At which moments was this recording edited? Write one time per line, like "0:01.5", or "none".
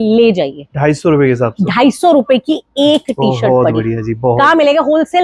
none